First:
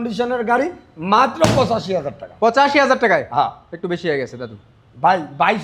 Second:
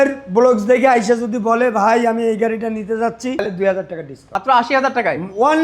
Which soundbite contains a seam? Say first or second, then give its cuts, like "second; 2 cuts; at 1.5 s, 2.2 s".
second; 2 cuts; at 3.4 s, 4.3 s